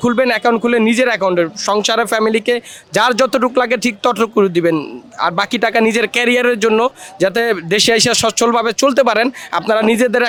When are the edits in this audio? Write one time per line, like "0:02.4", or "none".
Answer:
none